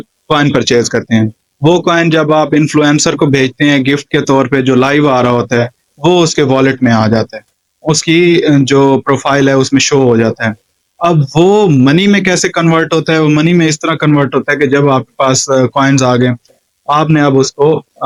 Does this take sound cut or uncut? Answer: uncut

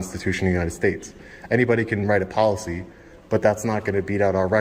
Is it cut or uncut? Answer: uncut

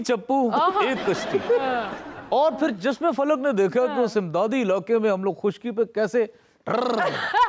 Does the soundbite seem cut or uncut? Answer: uncut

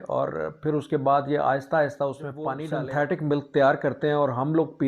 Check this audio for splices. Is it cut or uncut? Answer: cut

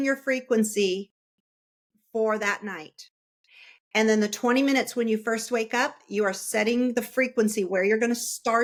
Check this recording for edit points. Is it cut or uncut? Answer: uncut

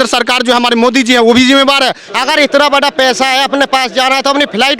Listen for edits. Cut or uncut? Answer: cut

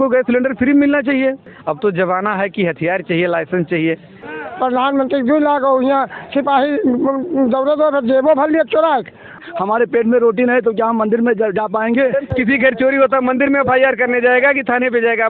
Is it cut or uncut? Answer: cut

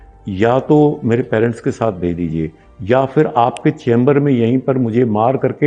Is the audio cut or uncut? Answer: uncut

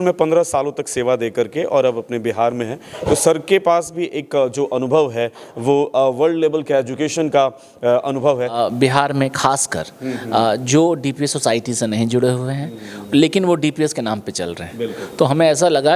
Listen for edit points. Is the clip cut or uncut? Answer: cut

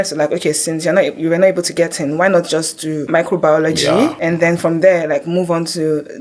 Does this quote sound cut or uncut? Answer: cut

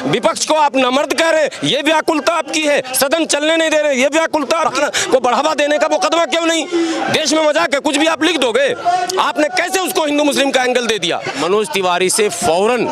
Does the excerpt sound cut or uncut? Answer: cut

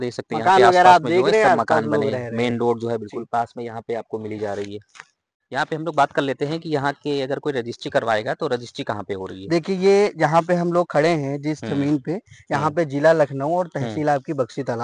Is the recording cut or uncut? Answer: uncut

